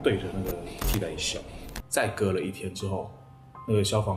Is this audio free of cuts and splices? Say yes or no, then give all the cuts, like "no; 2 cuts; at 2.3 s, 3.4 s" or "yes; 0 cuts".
no; 1 cut; at 1.7 s